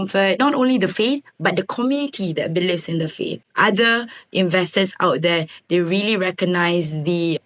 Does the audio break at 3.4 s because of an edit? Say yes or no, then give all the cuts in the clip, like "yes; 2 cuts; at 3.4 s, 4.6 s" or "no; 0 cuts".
yes; 1 cut; at 3.4 s